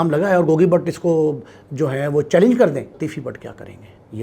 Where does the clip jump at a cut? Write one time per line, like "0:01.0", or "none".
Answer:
0:03.0